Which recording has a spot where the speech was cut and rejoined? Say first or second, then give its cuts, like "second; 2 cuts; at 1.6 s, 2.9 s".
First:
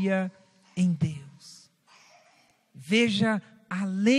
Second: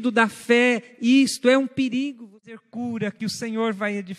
second; 1 cut; at 2.6 s